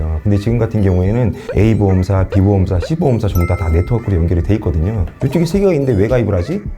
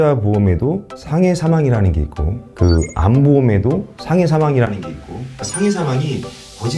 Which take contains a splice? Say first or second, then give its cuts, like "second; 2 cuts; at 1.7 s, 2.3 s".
first; 1 cut; at 5.2 s